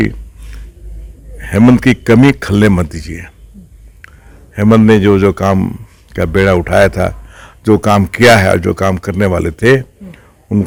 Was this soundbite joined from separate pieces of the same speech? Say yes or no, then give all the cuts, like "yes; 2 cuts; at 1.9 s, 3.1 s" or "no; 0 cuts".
no; 0 cuts